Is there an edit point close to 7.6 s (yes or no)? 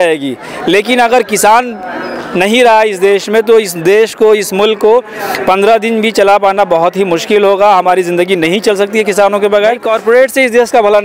no